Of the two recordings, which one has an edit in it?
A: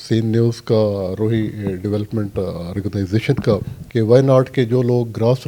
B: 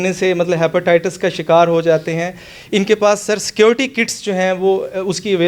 A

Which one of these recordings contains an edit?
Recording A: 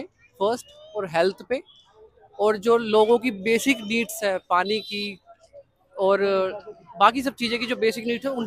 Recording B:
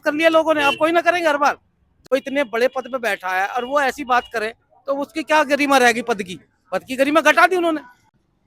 B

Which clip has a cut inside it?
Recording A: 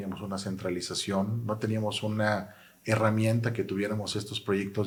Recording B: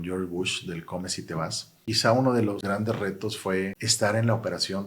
B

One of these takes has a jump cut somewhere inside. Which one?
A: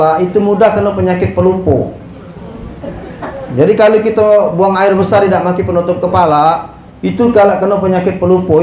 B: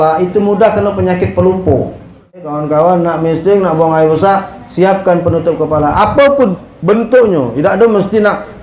B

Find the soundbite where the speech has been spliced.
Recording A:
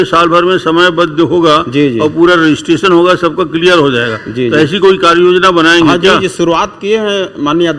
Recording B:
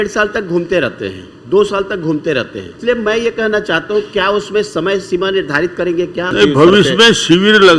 B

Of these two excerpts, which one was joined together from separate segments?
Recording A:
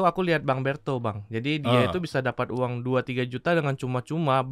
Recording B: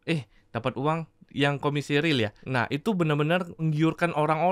B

